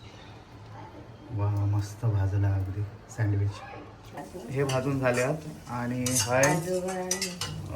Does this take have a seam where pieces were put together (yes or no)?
yes